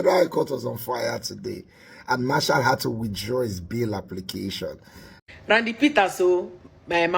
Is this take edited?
yes; 1 cut; at 5.1 s

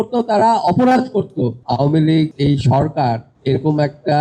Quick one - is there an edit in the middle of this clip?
yes; 3 cuts; at 1.6 s, 2.3 s, 3.3 s

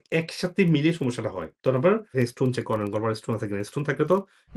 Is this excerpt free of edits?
yes; 0 cuts

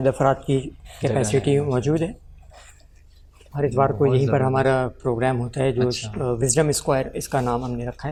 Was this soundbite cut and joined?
no; 0 cuts

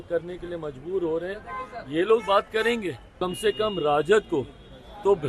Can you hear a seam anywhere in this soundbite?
yes; 1 cut; at 3.1 s

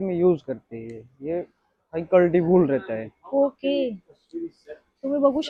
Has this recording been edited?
no; 0 cuts

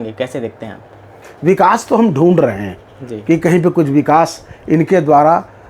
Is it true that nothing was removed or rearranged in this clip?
no; 1 cut; at 1.2 s

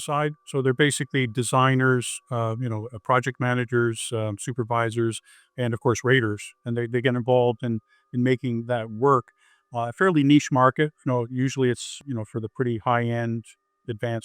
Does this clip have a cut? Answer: yes; 1 cut; at 12.0 s

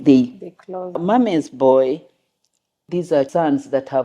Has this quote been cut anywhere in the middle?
yes; 2 cuts; at 0.9 s, 2.9 s

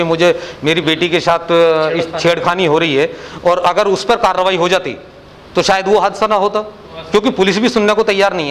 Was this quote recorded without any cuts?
yes; 0 cuts

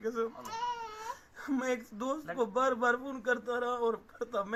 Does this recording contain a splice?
no; 0 cuts

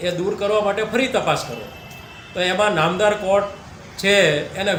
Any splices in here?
no; 0 cuts

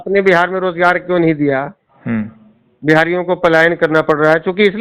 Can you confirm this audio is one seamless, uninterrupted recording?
yes; 0 cuts

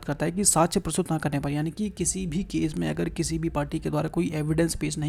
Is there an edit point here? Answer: no; 0 cuts

